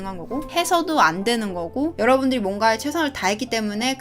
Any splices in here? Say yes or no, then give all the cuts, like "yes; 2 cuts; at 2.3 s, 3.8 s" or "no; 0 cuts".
yes; 1 cut; at 1.9 s